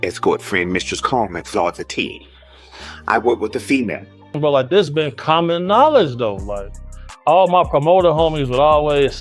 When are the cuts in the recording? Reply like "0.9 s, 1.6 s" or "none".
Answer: 4.4 s

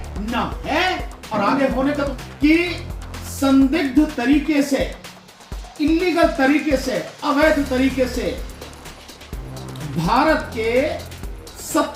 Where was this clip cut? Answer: 2.2 s

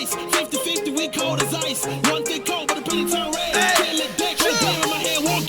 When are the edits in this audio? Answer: 3.4 s

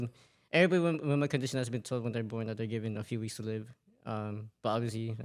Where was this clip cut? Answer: none

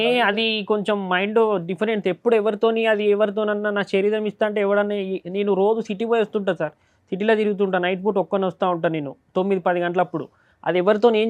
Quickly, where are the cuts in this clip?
none

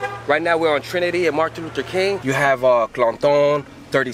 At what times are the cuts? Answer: 2.2 s

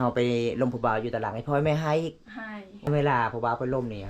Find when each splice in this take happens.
2.7 s

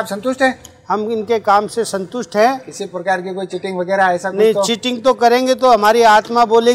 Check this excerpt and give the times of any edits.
none

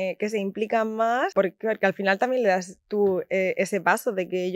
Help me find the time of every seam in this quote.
1.3 s

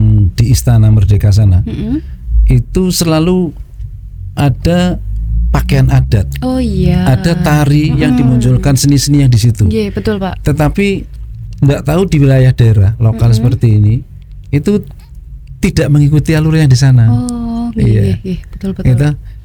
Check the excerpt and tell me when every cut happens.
none

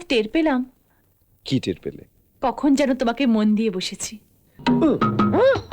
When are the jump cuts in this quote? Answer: 4.5 s

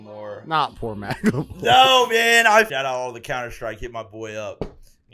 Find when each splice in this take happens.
2.7 s

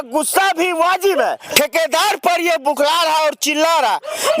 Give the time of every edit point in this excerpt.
1.4 s

